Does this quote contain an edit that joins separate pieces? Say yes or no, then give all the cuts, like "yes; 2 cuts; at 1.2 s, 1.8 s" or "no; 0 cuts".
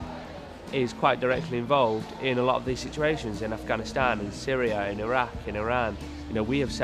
no; 0 cuts